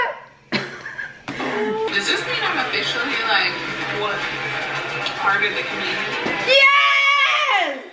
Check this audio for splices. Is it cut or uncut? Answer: cut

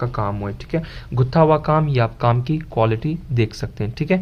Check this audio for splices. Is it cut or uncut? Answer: uncut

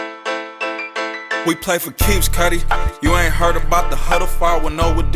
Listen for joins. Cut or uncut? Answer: cut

